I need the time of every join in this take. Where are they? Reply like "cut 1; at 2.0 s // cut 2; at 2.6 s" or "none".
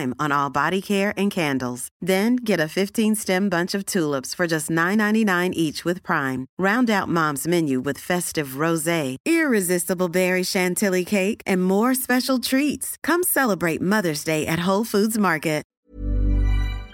cut 1; at 15.7 s